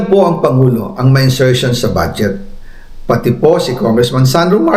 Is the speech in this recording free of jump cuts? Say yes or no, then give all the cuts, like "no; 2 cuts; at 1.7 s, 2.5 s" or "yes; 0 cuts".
yes; 0 cuts